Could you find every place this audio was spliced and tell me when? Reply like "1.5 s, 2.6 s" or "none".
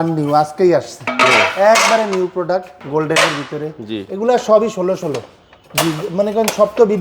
2.8 s